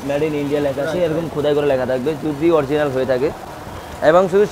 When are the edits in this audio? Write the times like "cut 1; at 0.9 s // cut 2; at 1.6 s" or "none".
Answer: none